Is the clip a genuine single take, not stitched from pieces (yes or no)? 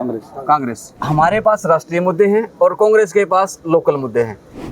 no